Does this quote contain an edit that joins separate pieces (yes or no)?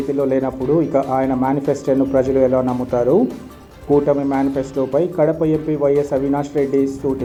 no